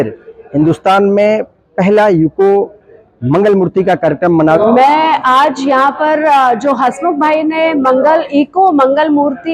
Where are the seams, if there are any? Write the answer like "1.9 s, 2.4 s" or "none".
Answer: 4.6 s